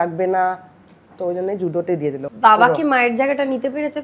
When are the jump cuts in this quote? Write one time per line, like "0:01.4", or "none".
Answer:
0:02.2

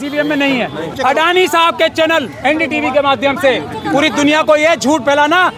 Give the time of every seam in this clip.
0:00.9

